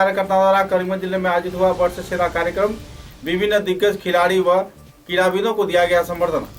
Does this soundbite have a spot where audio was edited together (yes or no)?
no